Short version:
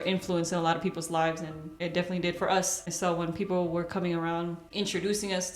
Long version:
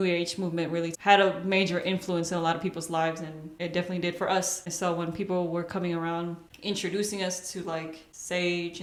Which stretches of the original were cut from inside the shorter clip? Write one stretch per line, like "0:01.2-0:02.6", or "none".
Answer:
0:06.4-0:06.5